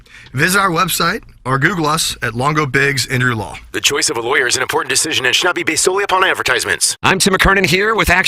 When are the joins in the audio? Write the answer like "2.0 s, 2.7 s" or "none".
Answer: 6.9 s